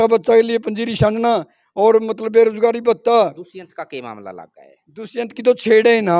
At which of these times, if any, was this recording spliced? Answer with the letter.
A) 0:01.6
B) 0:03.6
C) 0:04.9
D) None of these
D